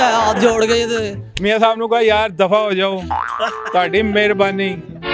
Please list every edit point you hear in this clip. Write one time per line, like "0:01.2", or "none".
0:01.2